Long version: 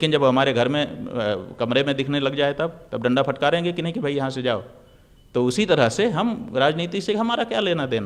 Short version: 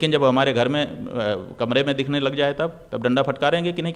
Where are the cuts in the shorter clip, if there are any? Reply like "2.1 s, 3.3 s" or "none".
none